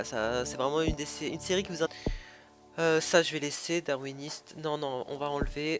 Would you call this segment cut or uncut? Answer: uncut